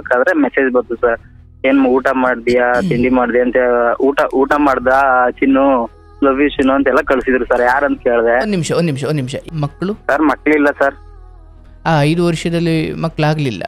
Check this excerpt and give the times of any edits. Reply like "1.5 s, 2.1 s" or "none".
9.4 s

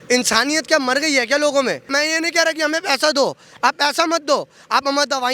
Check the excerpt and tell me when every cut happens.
1.9 s

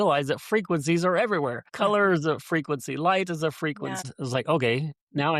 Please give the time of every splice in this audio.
1.7 s, 4.1 s

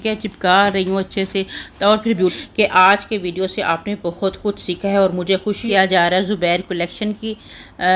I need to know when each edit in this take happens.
2.3 s, 5.6 s

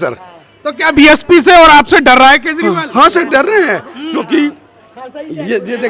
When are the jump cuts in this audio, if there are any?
none

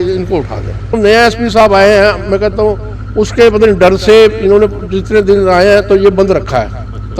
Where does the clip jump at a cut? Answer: 1.0 s

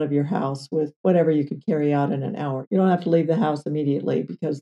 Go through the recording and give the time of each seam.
1.0 s, 2.6 s

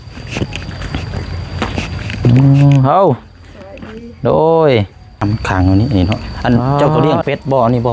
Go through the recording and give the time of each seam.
5.2 s

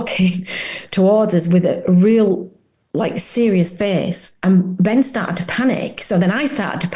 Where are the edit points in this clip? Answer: 4.2 s

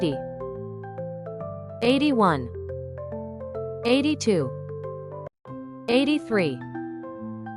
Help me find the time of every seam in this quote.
2.6 s, 3.8 s

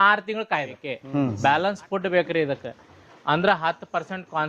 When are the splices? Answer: 1.0 s

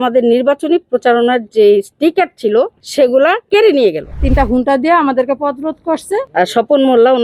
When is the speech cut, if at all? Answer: 3.1 s, 4.2 s, 6.3 s

